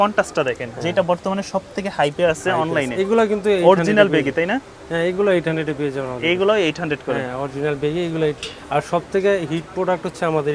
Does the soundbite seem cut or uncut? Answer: uncut